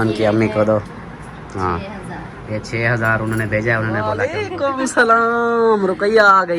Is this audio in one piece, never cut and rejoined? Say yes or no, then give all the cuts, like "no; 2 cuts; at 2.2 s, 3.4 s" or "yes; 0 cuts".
no; 1 cut; at 4.2 s